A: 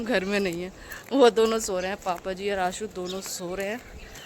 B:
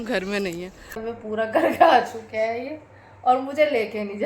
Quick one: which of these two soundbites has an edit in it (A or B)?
B